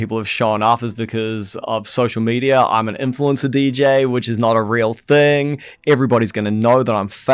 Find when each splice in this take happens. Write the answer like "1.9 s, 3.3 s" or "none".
none